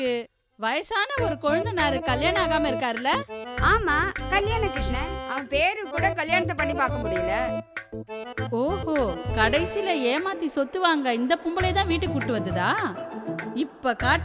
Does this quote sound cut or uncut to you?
uncut